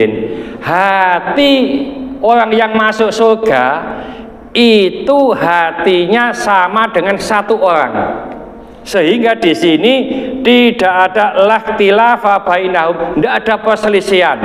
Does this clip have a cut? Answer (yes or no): no